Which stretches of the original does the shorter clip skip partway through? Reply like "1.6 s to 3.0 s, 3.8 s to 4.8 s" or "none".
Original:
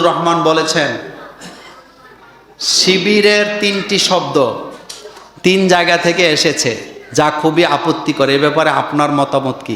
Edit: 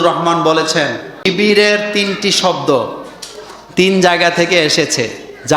1.3 s to 2.9 s